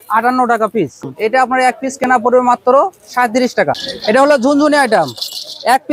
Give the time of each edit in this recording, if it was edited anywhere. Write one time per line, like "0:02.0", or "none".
0:01.0
0:03.9

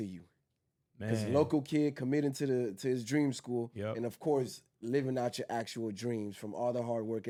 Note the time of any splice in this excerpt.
none

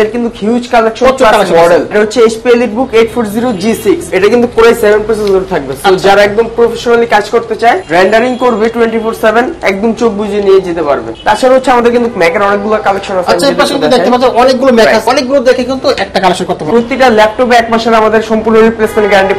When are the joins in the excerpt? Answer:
0:01.9
0:04.1
0:07.8
0:11.1
0:15.1
0:16.6

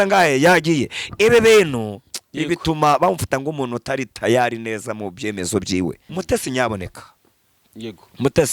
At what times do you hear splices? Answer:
0:06.1

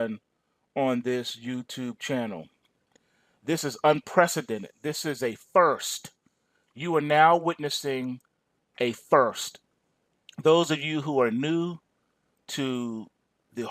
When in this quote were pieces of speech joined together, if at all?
0:10.6

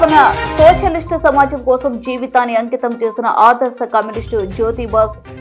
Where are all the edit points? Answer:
none

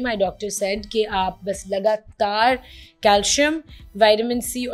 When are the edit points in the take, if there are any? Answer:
none

